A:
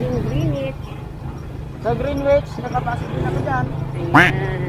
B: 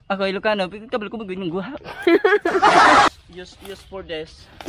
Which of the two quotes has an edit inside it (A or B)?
B